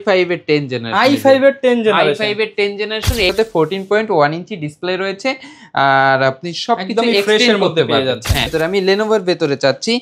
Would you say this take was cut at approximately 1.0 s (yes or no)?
no